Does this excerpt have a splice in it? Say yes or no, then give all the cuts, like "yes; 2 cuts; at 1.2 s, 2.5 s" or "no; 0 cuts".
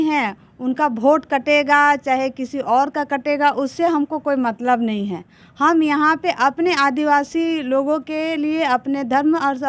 no; 0 cuts